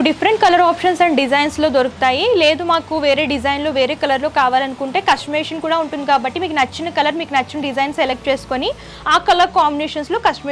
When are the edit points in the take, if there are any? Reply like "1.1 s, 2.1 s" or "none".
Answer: none